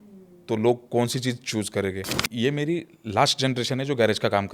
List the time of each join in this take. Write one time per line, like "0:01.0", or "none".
0:02.2